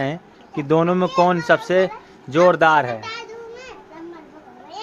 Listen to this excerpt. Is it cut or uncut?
uncut